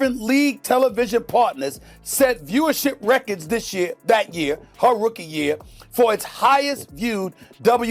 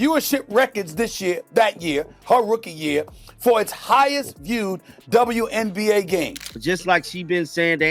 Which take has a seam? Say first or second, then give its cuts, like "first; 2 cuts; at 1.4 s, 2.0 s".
second; 1 cut; at 6.4 s